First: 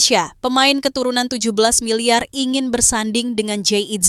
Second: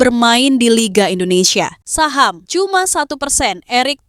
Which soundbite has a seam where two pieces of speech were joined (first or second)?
second